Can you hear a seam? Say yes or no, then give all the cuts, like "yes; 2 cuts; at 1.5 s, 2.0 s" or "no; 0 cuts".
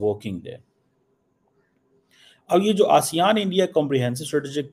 no; 0 cuts